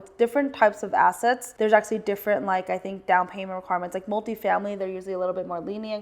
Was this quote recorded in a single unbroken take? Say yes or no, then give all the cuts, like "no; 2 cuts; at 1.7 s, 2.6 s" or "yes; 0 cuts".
no; 1 cut; at 1.5 s